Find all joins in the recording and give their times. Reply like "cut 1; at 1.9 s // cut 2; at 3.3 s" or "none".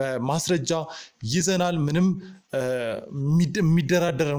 none